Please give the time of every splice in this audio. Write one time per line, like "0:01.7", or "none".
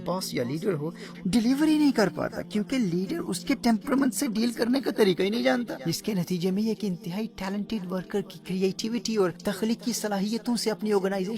0:01.1
0:05.8
0:09.4